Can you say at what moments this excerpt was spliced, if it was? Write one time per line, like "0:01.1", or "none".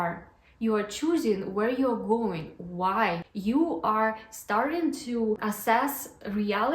0:03.3
0:05.4